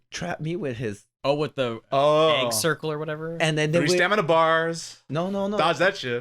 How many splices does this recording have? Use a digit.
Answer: 1